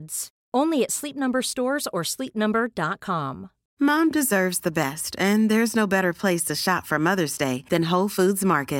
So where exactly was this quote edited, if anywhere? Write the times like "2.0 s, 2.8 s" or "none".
3.6 s